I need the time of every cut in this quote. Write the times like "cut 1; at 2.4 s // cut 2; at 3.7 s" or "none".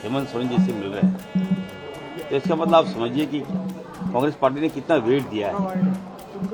none